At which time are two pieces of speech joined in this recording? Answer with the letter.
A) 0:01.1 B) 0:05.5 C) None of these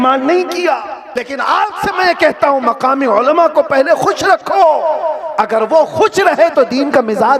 A